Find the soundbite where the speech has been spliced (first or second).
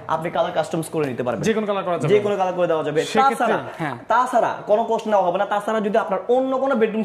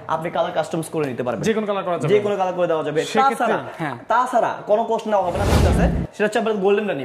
second